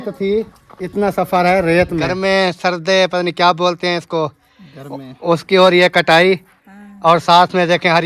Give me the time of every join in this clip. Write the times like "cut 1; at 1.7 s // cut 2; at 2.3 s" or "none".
cut 1; at 2.1 s